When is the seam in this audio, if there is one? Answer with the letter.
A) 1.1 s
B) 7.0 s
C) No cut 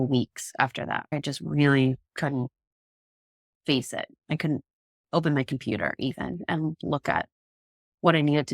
A